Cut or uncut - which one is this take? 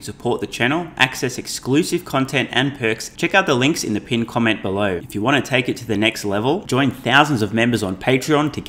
cut